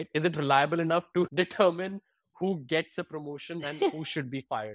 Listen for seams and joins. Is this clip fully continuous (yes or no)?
no